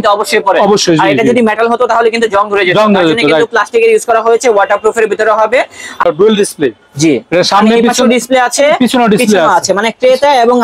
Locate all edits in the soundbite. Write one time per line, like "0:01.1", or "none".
0:06.0